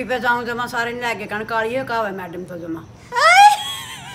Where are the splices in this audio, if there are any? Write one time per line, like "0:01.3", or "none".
none